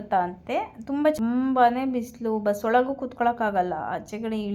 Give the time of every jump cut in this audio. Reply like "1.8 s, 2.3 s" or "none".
1.1 s